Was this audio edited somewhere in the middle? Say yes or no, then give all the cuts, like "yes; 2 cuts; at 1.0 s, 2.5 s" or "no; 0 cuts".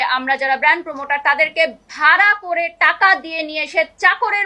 no; 0 cuts